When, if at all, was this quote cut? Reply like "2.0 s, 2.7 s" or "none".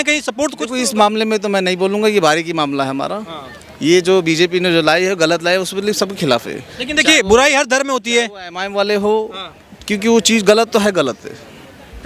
none